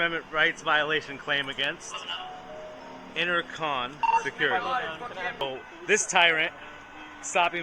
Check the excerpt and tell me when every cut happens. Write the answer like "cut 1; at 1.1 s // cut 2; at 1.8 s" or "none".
cut 1; at 5.4 s